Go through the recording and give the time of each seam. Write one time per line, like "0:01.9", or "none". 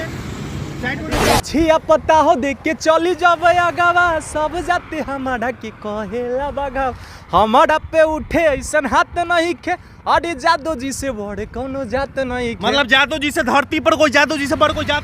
0:01.2

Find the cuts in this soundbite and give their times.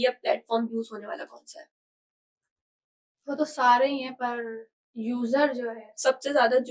none

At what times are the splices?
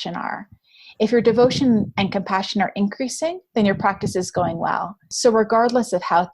0:05.1

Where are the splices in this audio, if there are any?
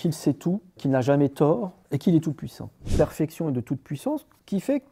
0:02.8

